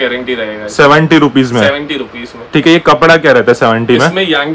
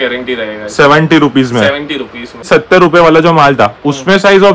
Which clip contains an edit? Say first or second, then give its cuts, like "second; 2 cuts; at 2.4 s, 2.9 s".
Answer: second; 1 cut; at 2.5 s